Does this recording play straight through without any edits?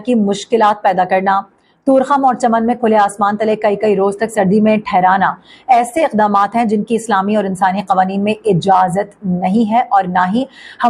yes; 0 cuts

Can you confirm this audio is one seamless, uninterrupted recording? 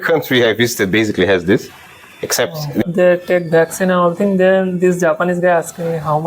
no; 1 cut; at 2.8 s

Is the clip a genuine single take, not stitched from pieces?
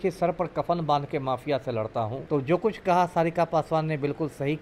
no; 1 cut; at 2.2 s

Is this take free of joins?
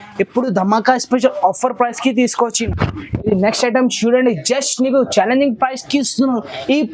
no; 1 cut; at 2.7 s

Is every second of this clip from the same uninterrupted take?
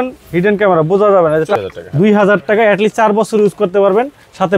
no; 1 cut; at 1.5 s

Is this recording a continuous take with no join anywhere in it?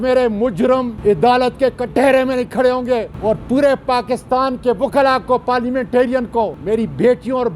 no; 3 cuts; at 0.9 s, 3.1 s, 6.6 s

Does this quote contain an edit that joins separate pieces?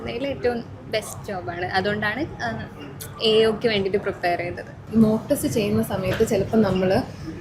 yes; 1 cut; at 4.8 s

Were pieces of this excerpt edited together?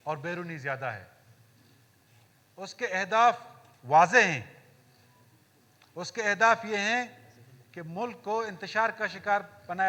no; 0 cuts

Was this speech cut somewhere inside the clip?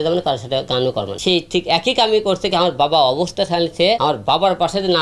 yes; 2 cuts; at 1.1 s, 4.0 s

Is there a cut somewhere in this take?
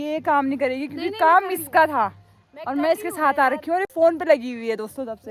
no; 0 cuts

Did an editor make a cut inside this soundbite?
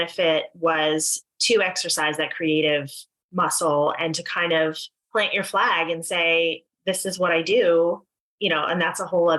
no; 0 cuts

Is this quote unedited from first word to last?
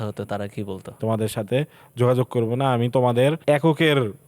no; 2 cuts; at 1.0 s, 3.4 s

